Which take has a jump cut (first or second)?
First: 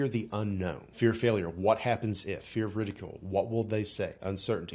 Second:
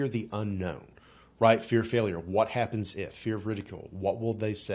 first